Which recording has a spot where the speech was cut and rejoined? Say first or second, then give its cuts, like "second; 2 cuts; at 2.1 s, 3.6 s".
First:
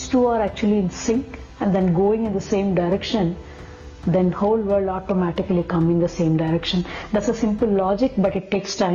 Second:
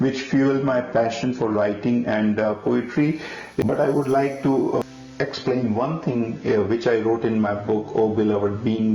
second; 2 cuts; at 3.6 s, 4.8 s